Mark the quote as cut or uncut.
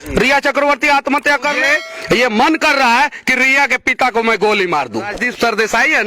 cut